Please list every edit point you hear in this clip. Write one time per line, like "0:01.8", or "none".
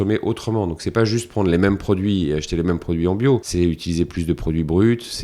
0:03.5